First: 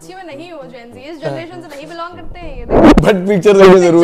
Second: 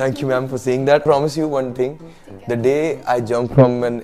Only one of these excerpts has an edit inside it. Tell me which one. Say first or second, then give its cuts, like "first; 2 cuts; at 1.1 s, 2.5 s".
second; 1 cut; at 1.0 s